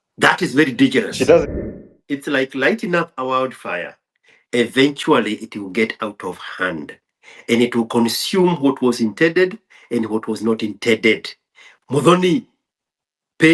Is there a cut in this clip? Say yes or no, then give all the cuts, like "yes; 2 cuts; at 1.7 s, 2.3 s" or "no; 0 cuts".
yes; 1 cut; at 1.4 s